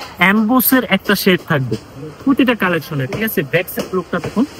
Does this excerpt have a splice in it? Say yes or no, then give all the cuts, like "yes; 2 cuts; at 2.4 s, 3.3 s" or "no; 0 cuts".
no; 0 cuts